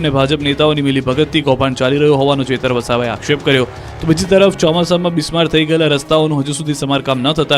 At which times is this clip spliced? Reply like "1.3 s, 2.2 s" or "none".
3.6 s